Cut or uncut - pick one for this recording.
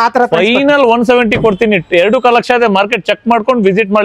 uncut